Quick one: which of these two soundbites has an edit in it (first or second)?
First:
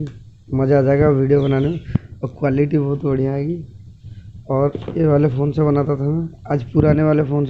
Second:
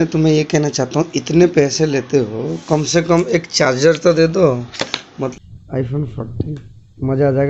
second